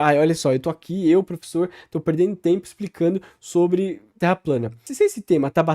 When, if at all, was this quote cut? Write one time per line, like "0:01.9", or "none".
0:04.8